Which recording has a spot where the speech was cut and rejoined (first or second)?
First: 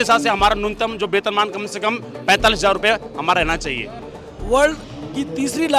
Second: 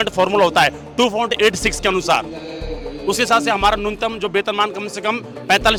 first